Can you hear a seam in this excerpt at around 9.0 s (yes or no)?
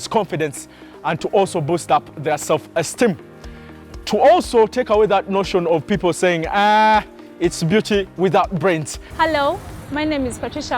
yes